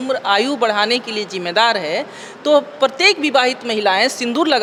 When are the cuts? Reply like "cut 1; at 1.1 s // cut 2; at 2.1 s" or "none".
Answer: none